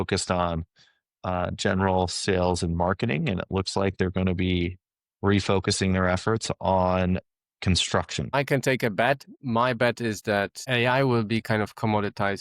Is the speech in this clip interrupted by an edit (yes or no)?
yes